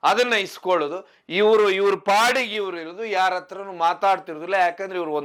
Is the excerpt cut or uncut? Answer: uncut